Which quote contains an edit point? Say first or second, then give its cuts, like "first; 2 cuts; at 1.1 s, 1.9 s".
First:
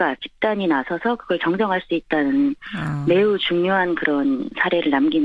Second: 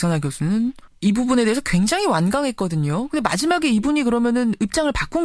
first; 1 cut; at 1.8 s